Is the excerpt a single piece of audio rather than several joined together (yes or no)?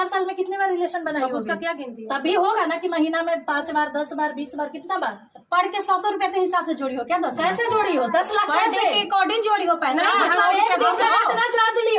yes